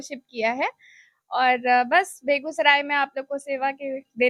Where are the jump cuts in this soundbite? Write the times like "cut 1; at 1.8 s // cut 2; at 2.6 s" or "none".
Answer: none